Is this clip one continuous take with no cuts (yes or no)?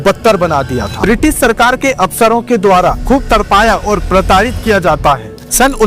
no